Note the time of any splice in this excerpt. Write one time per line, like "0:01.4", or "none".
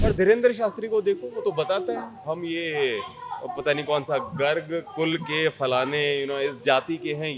none

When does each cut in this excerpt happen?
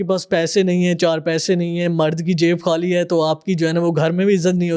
none

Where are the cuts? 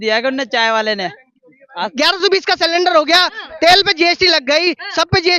0:01.7

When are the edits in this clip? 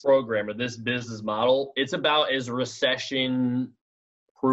none

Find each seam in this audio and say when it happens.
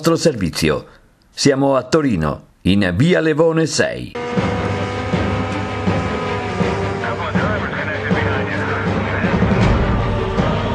0:04.1

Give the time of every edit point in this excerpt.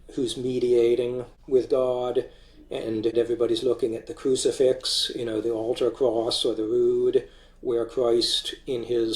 0:01.3
0:03.1

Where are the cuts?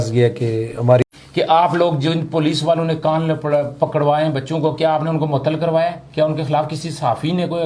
0:01.1

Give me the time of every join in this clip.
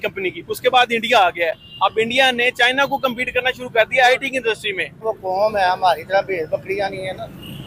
0:05.0

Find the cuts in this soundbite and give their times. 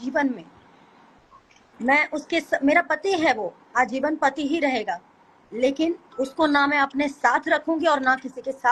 none

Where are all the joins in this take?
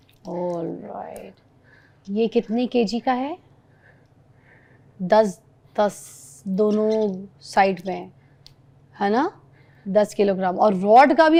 none

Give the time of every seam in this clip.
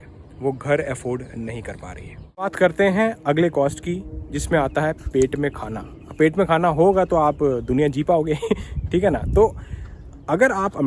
none

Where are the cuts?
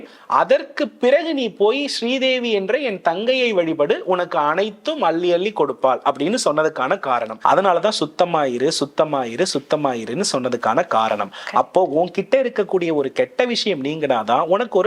0:07.3

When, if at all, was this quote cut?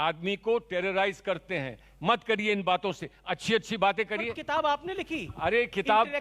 none

